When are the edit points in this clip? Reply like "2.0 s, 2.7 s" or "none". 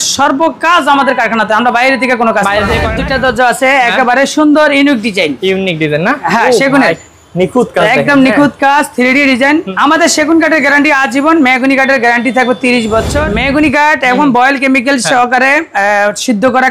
2.9 s, 9.7 s, 13.2 s